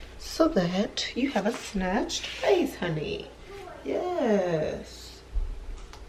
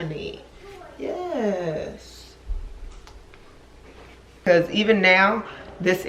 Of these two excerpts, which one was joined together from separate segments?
second; 1 cut; at 4.5 s

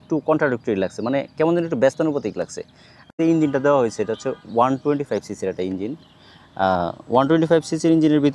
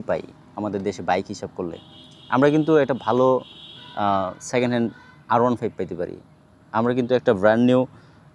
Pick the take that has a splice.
first; 1 cut; at 3.1 s

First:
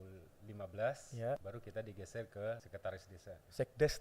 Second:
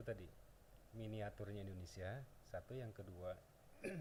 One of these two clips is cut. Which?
first; 2 cuts; at 1.4 s, 2.7 s

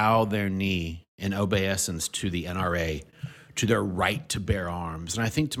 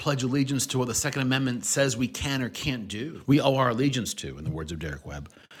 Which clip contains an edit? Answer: second; 1 cut; at 3.1 s

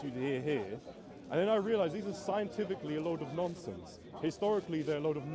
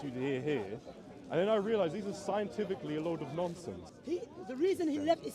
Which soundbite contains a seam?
second; 1 cut; at 3.9 s

